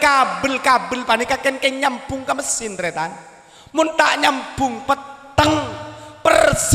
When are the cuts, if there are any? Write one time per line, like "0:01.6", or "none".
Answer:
none